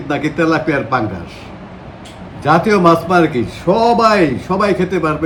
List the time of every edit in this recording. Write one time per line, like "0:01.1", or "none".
none